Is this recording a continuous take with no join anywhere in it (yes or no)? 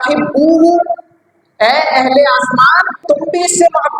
yes